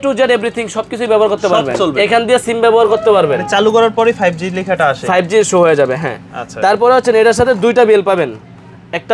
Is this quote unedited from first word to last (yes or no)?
yes